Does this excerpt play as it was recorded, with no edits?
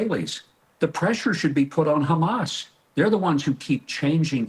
yes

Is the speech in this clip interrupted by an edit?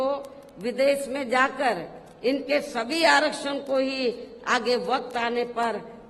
no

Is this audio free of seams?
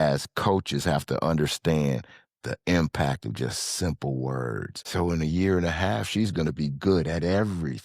no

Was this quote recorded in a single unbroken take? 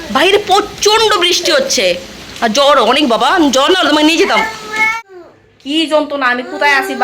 no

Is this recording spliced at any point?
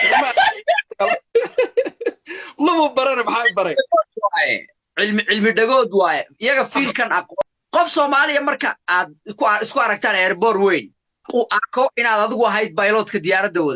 yes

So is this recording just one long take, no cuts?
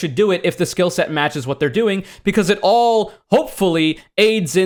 yes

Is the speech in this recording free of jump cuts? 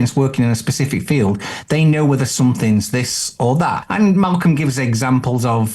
no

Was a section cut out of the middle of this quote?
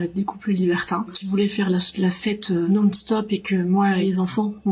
yes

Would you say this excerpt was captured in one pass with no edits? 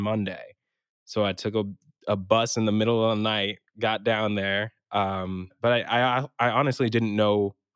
no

